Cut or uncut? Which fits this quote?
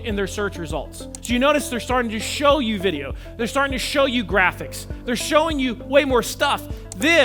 uncut